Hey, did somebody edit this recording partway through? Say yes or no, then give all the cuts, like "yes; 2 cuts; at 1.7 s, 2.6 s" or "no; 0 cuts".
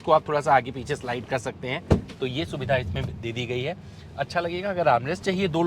no; 0 cuts